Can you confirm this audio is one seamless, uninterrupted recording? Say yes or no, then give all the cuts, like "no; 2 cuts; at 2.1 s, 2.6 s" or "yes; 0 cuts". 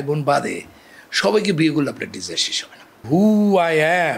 no; 1 cut; at 3.0 s